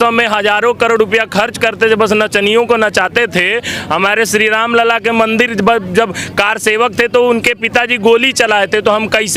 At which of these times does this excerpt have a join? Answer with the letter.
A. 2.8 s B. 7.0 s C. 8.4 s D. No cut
D